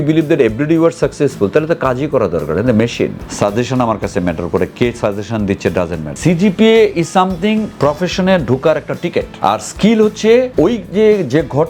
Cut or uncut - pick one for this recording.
cut